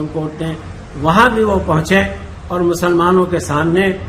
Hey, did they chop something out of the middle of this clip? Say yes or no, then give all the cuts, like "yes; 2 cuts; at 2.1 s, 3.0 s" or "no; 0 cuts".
no; 0 cuts